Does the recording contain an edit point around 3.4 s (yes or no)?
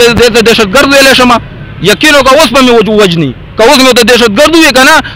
no